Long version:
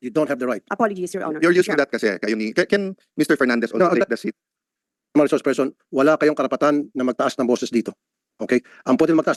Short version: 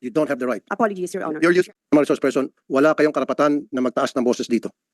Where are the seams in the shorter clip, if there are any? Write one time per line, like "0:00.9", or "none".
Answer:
0:01.7